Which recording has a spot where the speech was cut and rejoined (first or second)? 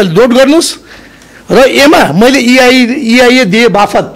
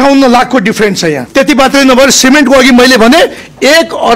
second